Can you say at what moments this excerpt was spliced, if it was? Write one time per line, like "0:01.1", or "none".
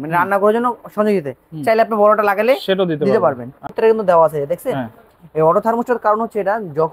0:03.7